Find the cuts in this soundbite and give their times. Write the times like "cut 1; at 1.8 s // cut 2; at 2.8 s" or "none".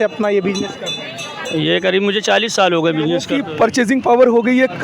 cut 1; at 3.4 s